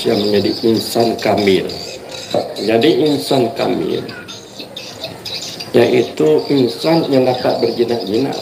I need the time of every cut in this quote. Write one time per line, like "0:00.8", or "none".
0:02.2